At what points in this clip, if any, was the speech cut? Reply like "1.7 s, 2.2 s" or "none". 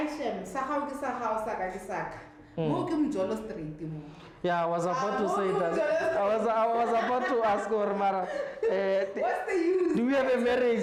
none

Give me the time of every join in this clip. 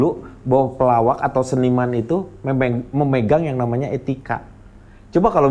none

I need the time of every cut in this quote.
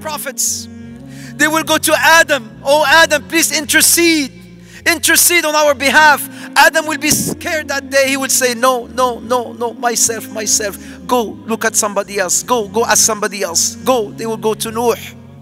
none

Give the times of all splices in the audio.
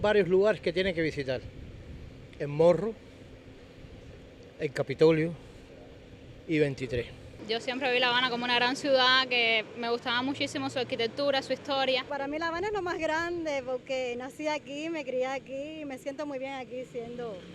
7.8 s, 12.1 s

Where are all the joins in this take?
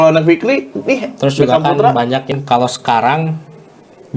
2.3 s

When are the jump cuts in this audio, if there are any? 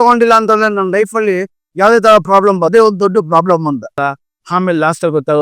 2.7 s, 4.0 s

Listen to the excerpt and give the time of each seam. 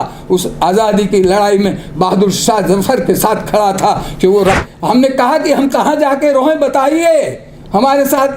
4.6 s

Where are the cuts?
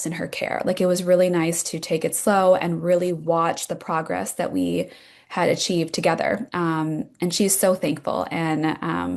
none

